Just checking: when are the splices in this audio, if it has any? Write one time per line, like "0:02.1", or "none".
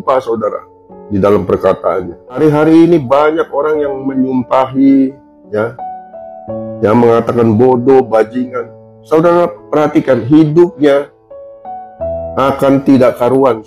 0:02.4

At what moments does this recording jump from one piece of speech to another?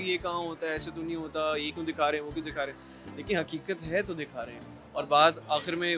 none

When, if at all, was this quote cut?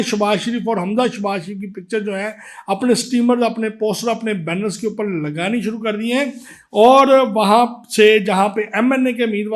none

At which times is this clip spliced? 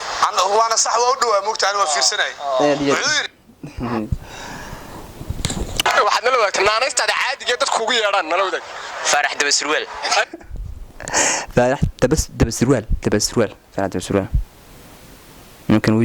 0:05.8

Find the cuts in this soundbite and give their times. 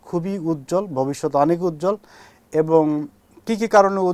none

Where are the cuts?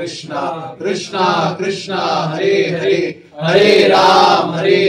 none

